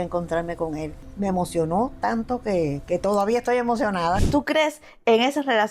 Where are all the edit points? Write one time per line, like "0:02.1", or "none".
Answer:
0:01.0
0:04.2